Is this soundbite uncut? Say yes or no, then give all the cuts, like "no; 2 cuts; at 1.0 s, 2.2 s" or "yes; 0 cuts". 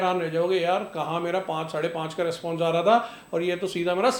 yes; 0 cuts